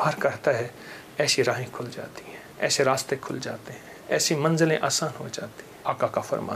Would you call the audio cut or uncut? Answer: cut